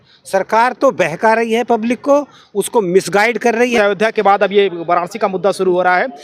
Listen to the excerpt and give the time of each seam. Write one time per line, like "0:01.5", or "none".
0:03.7